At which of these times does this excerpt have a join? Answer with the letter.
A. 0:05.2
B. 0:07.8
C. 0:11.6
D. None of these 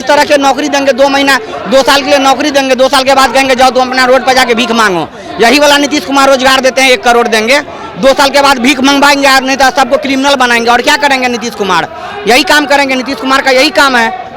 D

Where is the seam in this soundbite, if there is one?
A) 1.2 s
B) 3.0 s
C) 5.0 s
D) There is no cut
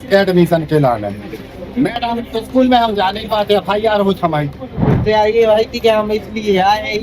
C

